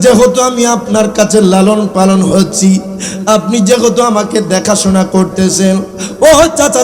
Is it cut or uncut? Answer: uncut